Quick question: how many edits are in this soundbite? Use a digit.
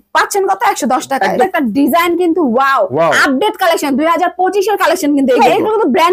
2